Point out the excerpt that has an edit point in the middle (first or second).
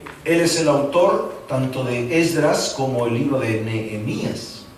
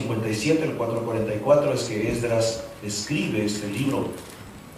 second